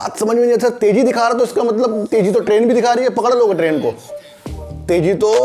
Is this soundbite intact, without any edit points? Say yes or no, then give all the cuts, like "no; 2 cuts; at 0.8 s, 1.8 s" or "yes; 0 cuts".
yes; 0 cuts